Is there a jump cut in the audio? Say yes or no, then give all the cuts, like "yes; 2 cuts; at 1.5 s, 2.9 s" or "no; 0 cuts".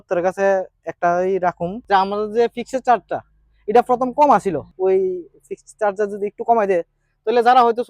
yes; 2 cuts; at 1.7 s, 4.7 s